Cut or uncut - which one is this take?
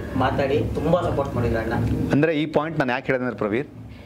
uncut